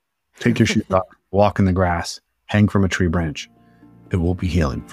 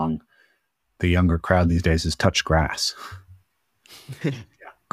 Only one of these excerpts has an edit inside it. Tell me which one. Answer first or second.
first